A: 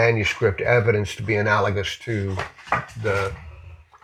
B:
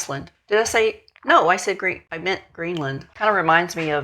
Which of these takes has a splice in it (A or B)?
B